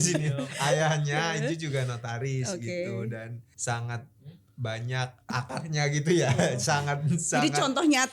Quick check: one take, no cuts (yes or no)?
no